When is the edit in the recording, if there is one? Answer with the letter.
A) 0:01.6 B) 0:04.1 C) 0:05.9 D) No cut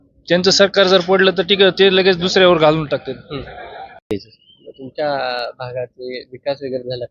B